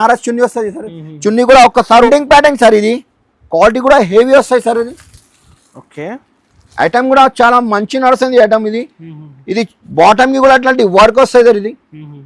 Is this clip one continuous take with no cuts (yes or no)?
no